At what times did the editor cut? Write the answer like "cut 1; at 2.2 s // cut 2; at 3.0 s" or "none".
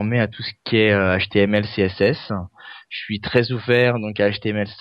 none